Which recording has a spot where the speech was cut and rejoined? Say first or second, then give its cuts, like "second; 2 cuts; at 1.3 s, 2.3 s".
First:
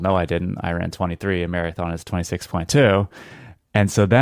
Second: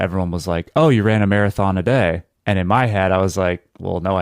second; 1 cut; at 2.3 s